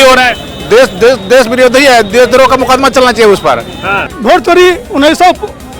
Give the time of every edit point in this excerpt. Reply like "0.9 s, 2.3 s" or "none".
4.1 s